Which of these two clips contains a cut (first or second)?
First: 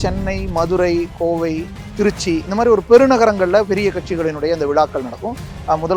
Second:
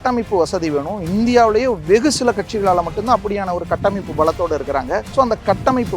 second